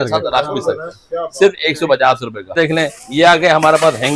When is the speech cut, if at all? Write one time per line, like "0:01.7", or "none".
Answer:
none